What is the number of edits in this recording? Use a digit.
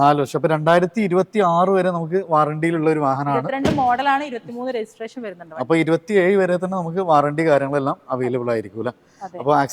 0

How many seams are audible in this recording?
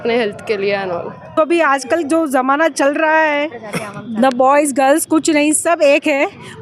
1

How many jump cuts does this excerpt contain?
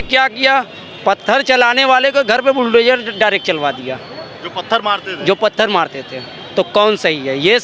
0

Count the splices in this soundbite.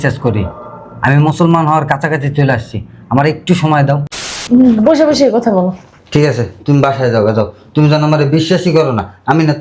1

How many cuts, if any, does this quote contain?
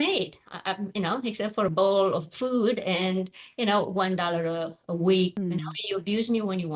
1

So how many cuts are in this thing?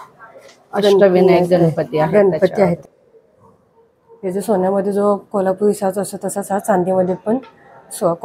1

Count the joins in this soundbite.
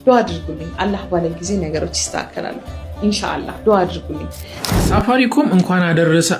1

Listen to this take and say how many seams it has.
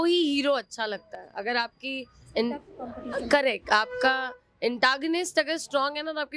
0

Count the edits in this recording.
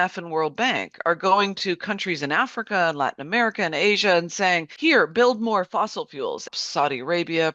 2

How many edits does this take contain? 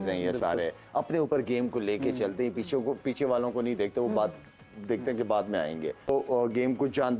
1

